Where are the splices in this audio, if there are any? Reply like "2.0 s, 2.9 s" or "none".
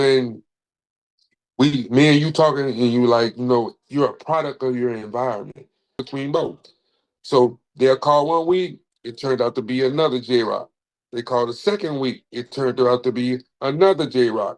6.0 s